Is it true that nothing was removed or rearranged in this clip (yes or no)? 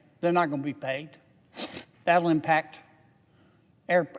yes